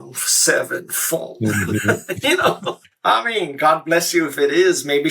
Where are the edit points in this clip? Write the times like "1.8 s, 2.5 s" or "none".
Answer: 2.9 s